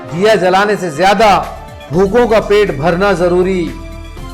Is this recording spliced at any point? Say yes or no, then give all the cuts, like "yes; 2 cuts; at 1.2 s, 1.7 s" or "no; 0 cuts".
no; 0 cuts